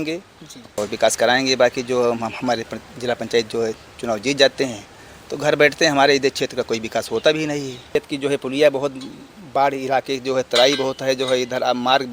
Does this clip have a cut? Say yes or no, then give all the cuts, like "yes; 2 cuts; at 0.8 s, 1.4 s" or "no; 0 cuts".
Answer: yes; 2 cuts; at 0.8 s, 7.9 s